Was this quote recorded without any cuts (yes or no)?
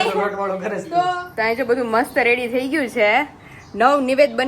no